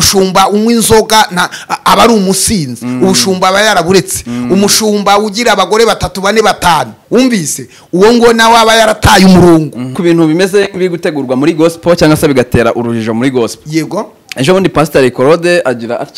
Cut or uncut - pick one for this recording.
cut